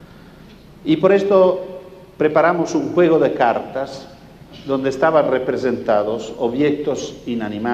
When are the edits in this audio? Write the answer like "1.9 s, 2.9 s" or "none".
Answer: 3.8 s